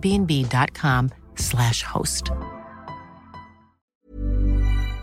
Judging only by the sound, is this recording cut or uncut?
cut